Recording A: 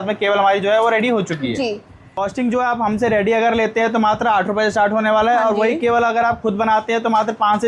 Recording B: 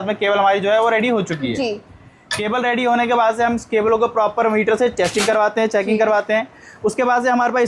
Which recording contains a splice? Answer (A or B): A